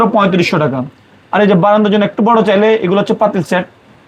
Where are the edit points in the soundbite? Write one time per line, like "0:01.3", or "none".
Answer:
none